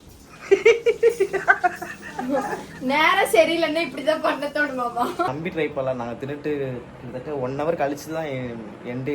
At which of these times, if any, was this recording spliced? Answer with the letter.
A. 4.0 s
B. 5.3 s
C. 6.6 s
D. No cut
B